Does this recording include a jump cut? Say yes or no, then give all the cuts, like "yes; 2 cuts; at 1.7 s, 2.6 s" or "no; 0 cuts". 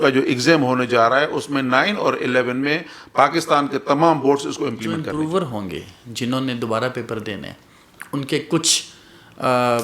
yes; 1 cut; at 5.0 s